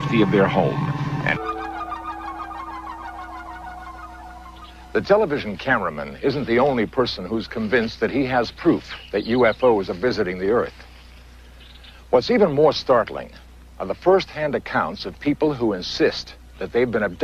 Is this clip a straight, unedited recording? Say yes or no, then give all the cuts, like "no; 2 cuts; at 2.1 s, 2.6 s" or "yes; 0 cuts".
yes; 0 cuts